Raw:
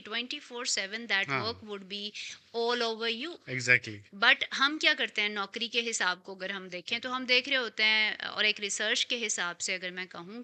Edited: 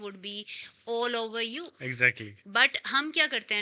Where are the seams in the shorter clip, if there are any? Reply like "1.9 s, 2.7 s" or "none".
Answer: none